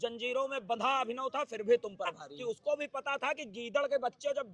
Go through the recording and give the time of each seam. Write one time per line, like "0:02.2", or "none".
0:02.3

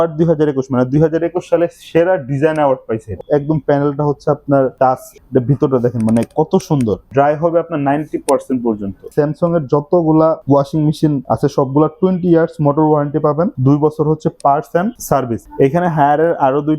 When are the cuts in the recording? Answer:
0:03.1
0:04.7
0:07.0
0:09.1
0:15.4

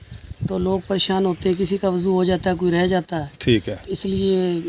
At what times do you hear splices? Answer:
none

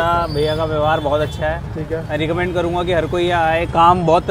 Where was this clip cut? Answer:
none

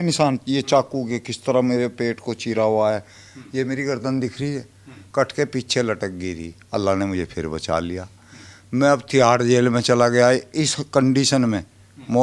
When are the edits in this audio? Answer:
none

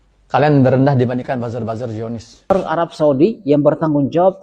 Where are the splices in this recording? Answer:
0:02.5

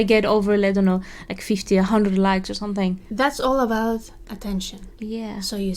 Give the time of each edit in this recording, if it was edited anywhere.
0:03.0

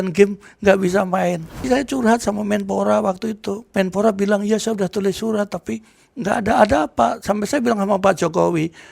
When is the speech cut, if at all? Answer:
0:01.7
0:03.6

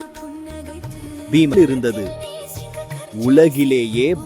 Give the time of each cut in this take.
0:01.5

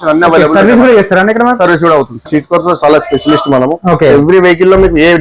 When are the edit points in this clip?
0:02.3

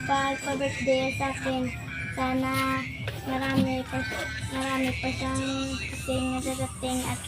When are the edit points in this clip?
0:06.1

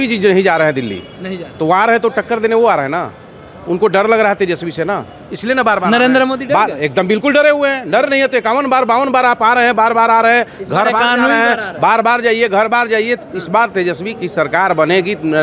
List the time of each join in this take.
none

